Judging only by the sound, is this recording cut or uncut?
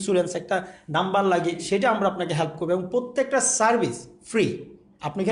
uncut